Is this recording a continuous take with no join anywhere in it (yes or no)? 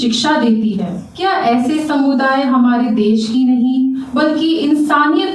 no